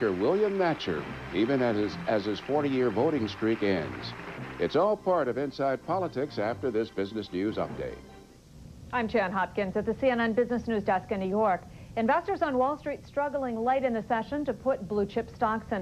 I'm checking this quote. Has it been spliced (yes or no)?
no